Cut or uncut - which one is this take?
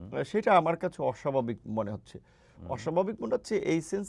uncut